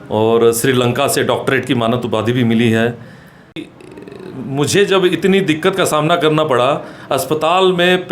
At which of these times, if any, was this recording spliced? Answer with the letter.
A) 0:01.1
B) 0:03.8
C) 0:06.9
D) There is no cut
B